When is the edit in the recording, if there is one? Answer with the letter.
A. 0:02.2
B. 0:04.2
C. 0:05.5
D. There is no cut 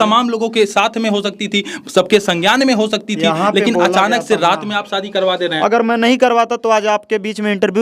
C